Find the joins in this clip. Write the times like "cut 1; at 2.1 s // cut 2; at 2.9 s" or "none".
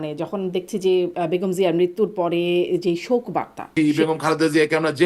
cut 1; at 3.7 s